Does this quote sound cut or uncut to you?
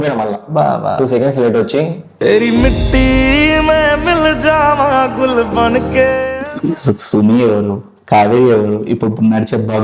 cut